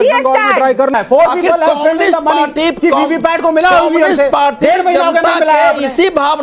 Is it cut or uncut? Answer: cut